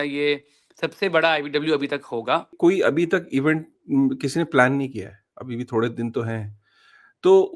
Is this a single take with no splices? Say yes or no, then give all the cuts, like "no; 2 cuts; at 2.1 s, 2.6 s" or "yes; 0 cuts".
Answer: no; 1 cut; at 2.5 s